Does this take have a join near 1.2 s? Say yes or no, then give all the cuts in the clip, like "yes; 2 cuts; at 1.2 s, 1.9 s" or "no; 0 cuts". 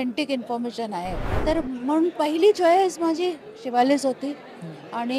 yes; 1 cut; at 1.2 s